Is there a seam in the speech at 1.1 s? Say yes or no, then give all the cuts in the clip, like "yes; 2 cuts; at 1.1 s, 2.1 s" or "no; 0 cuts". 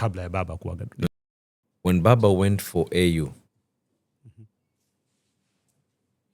yes; 1 cut; at 1.1 s